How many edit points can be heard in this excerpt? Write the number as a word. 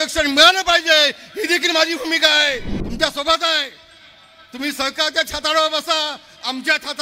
one